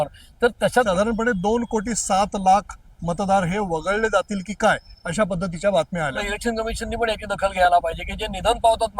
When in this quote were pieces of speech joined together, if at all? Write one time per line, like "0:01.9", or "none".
0:00.9
0:06.2